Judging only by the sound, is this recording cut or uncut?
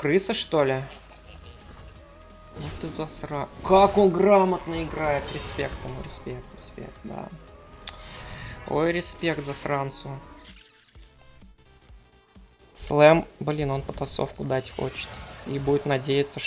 cut